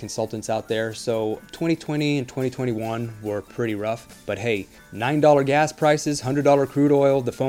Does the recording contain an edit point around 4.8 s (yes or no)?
yes